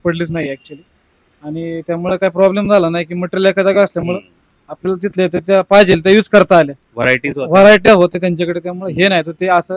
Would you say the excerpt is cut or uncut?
uncut